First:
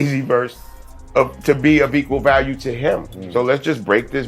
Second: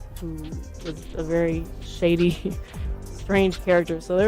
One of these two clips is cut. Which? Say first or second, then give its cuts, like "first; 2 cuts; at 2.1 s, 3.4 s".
first; 1 cut; at 3.2 s